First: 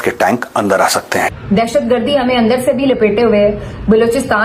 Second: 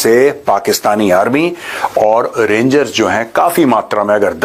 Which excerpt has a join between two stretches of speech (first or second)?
first